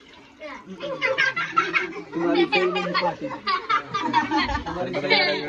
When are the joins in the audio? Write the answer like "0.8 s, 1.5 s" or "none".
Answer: none